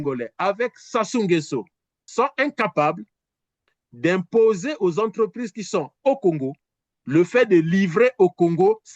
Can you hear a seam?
yes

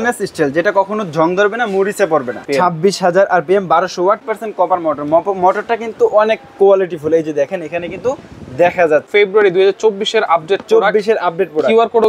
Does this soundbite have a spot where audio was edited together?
yes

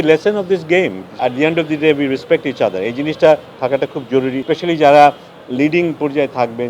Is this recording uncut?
no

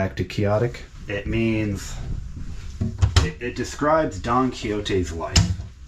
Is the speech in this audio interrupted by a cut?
no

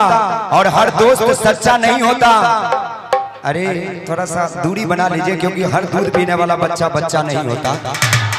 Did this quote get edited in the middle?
no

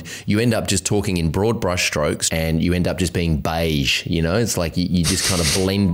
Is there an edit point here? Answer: yes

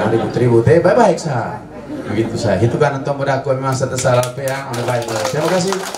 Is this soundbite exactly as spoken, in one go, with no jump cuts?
yes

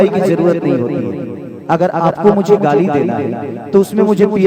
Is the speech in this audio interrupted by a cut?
no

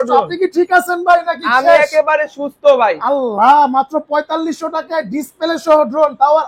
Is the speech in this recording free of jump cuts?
yes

